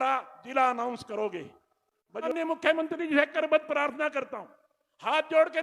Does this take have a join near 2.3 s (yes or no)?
yes